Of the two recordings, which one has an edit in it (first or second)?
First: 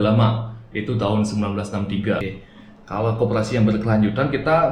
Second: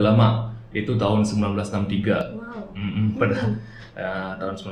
first